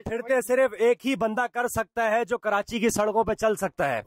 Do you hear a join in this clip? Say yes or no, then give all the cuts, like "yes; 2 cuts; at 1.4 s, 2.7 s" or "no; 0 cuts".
no; 0 cuts